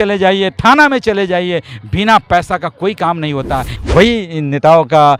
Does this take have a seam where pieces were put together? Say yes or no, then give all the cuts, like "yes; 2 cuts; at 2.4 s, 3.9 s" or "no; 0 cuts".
yes; 1 cut; at 3.7 s